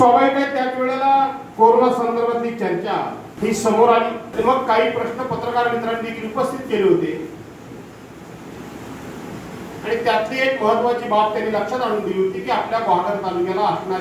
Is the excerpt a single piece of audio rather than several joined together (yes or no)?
no